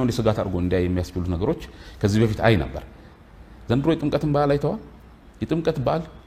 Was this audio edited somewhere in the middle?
no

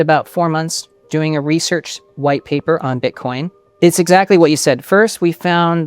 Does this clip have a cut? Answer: yes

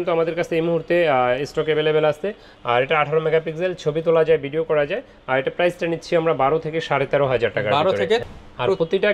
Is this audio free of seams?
yes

